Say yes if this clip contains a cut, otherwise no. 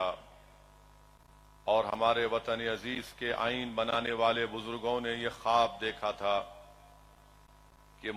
no